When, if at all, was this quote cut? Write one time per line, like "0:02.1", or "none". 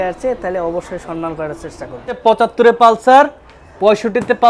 0:02.2